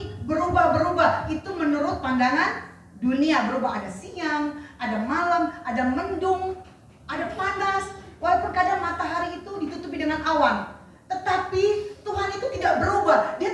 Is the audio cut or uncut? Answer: uncut